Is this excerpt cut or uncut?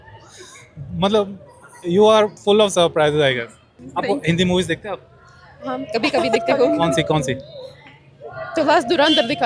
cut